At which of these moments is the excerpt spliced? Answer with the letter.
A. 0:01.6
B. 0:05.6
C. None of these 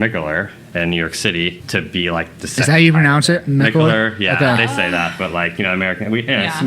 A